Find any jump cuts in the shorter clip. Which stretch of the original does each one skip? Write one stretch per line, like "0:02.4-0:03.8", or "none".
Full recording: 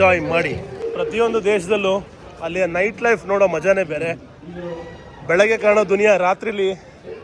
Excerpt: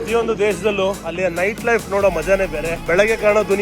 0:02.1-0:02.4
0:04.2-0:05.2